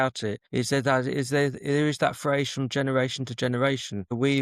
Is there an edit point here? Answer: no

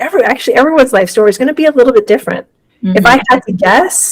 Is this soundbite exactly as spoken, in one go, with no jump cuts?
yes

